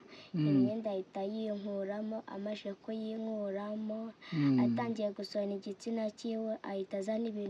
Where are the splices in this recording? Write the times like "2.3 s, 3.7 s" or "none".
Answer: none